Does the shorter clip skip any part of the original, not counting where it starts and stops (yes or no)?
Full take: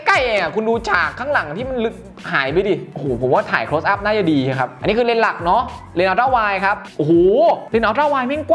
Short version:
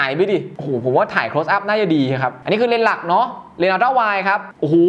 no